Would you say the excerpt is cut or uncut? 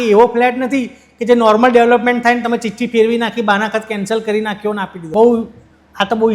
cut